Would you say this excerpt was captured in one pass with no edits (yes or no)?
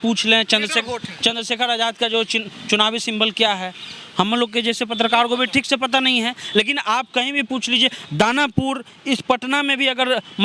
yes